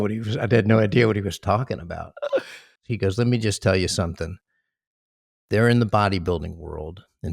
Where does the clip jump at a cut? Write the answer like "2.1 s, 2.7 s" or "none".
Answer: 2.8 s